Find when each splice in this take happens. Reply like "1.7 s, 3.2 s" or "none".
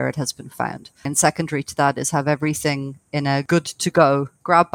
1.1 s, 3.4 s